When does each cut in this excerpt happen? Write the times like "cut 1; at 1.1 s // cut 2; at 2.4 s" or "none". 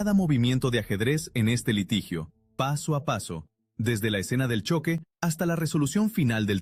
none